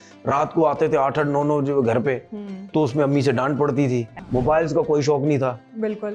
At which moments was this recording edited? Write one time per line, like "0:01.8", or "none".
0:04.2